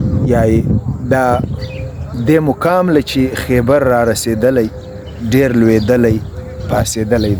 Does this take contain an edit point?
no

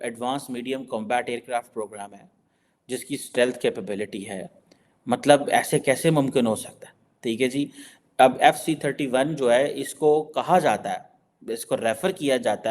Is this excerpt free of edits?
yes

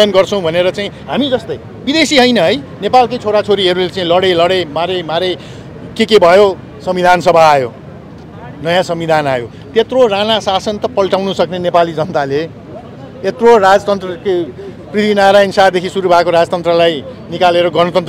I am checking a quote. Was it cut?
no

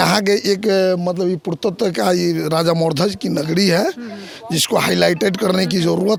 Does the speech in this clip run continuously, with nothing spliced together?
yes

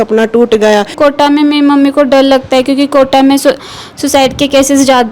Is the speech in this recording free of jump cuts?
no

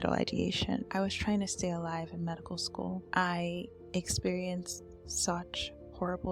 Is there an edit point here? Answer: yes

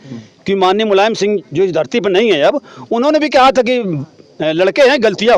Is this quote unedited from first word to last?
yes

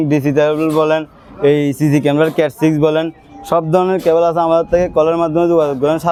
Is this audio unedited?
yes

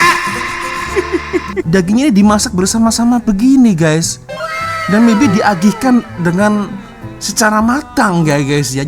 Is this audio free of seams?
no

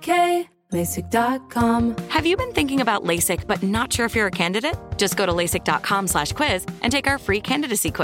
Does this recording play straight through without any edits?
no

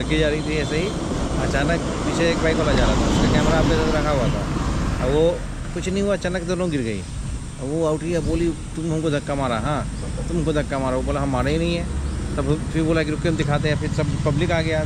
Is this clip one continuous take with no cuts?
yes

